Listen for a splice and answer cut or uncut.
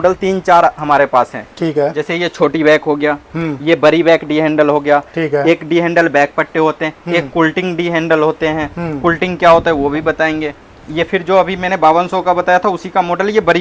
uncut